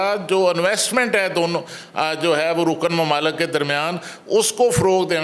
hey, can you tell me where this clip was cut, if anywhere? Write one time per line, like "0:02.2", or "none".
none